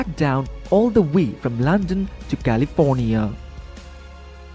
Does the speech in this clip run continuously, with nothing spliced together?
no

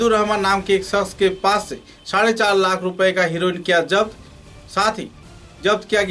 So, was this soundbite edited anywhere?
no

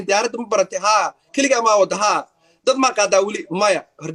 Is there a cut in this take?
no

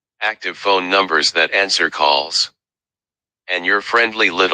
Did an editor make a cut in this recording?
yes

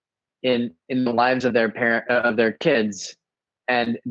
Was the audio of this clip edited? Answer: no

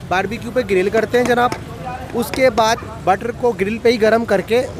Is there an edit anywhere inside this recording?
no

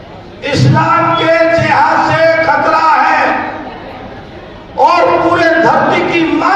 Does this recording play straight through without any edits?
yes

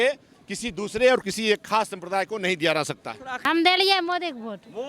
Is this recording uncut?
no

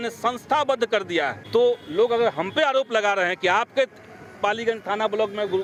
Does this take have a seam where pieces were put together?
no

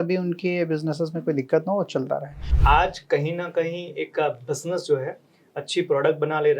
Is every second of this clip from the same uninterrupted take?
no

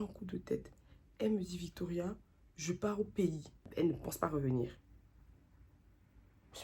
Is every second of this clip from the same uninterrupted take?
no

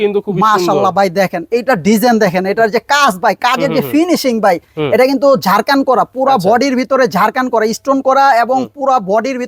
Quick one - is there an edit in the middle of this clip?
no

